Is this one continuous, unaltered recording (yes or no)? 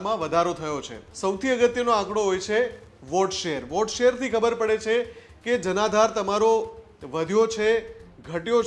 no